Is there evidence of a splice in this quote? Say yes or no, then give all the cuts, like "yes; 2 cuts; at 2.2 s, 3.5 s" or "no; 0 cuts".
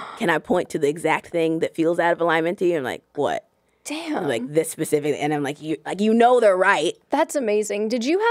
yes; 1 cut; at 7.0 s